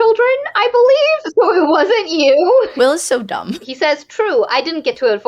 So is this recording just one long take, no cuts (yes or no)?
no